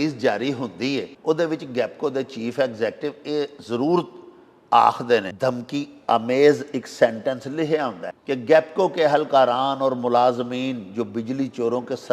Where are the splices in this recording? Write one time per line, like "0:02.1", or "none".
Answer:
0:01.1
0:05.3
0:08.1

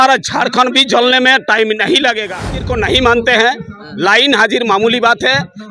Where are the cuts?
0:02.6

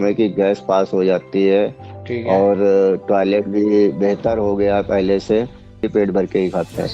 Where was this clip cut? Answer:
0:05.9

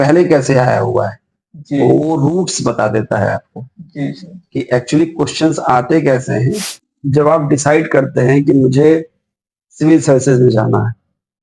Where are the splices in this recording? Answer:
0:06.6

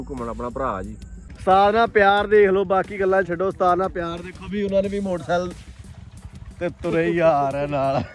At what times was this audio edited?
0:01.3

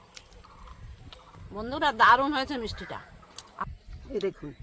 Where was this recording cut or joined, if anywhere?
0:01.3
0:03.6

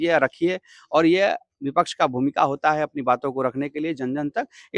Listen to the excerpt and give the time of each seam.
none

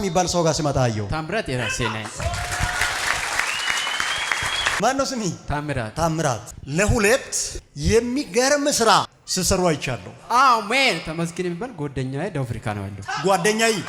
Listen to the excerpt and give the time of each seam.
none

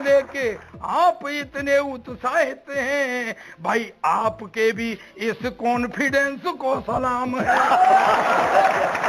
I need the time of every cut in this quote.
none

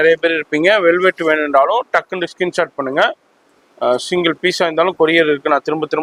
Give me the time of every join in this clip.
none

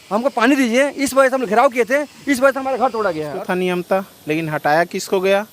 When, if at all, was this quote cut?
0:03.3

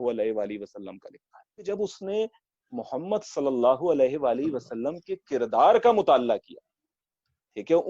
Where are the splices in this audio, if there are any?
0:01.6

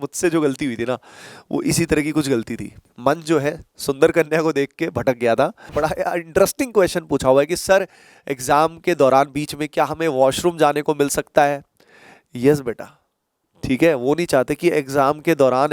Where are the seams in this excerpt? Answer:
0:02.9
0:05.7

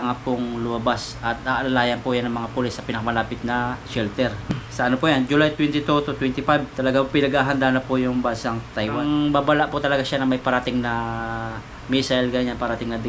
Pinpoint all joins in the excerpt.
0:04.6
0:09.0

